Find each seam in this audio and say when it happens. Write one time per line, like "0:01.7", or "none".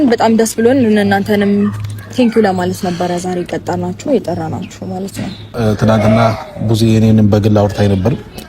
0:05.5